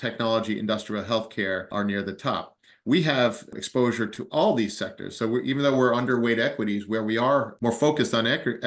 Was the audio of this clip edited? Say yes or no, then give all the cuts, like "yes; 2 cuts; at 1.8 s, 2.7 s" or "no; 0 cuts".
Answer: yes; 1 cut; at 7.5 s